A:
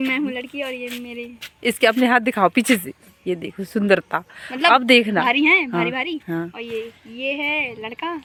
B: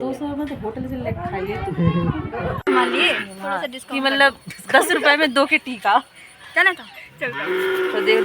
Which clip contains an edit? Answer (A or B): B